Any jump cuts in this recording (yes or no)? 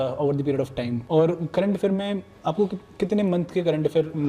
yes